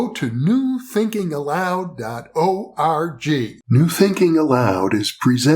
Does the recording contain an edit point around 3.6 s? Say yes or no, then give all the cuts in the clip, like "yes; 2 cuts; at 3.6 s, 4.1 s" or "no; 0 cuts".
yes; 1 cut; at 3.6 s